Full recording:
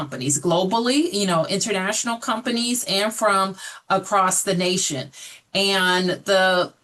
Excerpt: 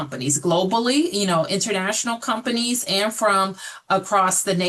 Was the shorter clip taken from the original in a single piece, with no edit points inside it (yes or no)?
yes